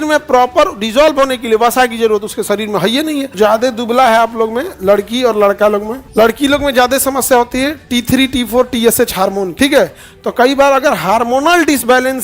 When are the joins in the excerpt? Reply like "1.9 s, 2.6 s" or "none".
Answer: 3.3 s, 6.0 s, 9.5 s